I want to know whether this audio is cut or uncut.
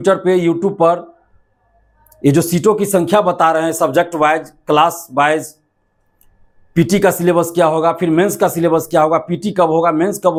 uncut